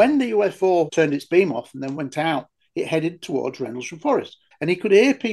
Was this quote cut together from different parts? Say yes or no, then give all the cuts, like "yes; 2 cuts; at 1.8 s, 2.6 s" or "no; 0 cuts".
yes; 2 cuts; at 0.9 s, 4.4 s